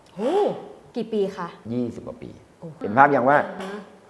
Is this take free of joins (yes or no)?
no